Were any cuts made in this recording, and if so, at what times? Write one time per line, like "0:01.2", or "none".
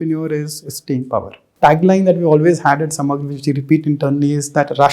0:01.4